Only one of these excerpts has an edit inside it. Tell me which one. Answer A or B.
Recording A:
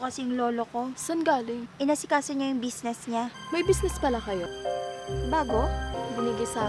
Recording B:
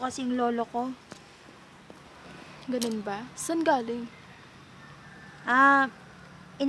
A